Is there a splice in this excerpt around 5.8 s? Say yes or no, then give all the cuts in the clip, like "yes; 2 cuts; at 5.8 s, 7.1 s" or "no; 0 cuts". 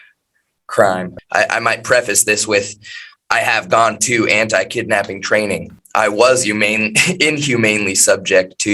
yes; 2 cuts; at 1.1 s, 5.8 s